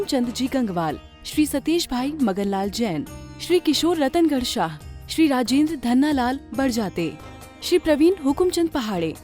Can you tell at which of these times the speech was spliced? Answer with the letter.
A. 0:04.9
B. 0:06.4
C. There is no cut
C